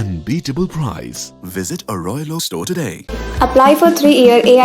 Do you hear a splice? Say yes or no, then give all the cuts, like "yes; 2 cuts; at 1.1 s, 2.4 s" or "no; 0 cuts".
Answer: no; 0 cuts